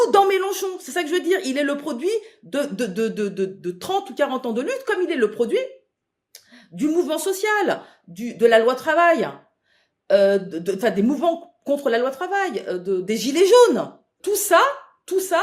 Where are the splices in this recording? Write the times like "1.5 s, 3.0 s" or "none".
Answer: 14.1 s